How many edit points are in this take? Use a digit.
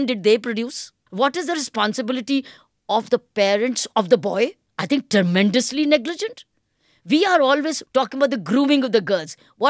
3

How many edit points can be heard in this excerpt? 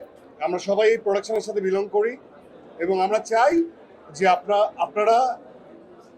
0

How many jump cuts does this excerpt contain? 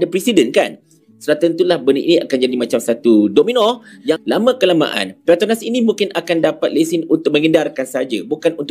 2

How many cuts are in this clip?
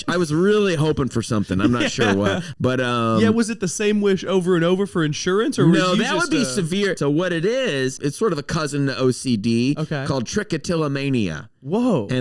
3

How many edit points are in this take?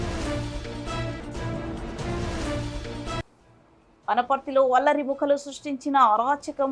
2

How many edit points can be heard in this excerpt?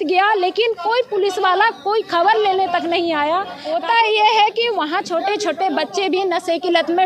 1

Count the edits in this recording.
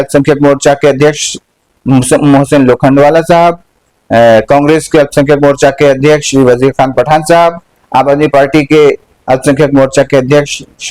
0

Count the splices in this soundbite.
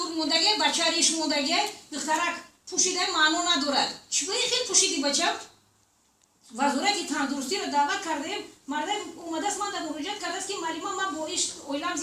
0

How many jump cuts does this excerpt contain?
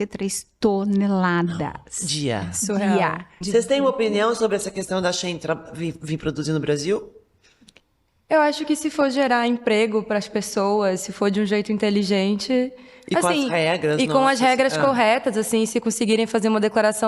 1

